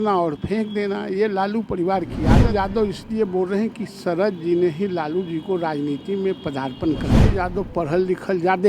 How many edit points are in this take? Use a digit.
2